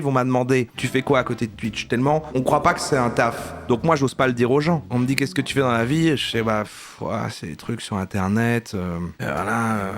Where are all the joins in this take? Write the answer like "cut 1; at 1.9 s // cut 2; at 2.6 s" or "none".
cut 1; at 0.7 s // cut 2; at 2.3 s // cut 3; at 3.5 s